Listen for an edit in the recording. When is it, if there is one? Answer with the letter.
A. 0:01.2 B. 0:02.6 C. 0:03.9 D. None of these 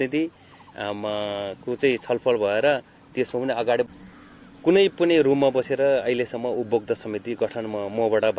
C